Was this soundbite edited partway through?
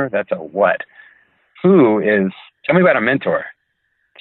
yes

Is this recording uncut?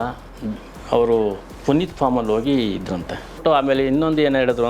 no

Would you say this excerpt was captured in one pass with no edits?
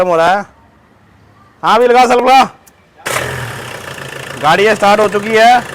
no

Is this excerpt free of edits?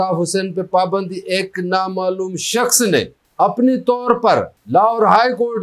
no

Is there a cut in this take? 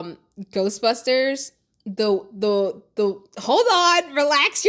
no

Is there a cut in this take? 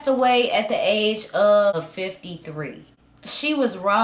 yes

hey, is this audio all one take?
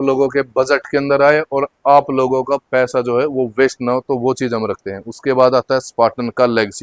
yes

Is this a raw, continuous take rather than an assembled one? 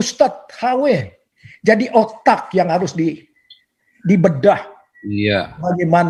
yes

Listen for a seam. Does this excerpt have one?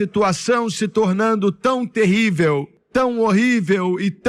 yes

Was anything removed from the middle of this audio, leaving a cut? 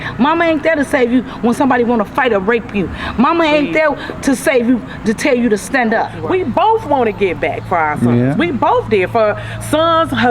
yes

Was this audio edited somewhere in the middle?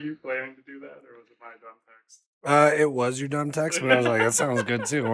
no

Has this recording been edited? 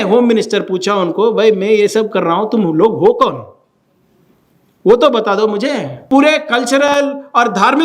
yes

